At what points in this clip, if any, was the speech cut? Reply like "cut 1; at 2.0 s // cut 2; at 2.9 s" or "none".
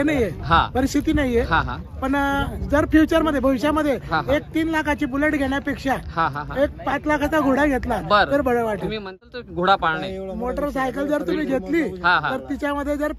cut 1; at 9.3 s